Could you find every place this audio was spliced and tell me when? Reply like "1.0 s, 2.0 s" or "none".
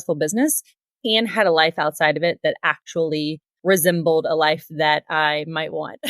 3.5 s